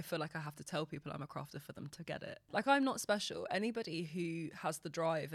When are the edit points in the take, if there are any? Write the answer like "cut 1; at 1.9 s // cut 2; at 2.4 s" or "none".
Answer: cut 1; at 2.4 s